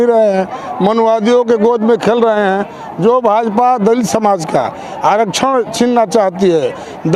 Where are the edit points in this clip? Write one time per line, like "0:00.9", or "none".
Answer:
none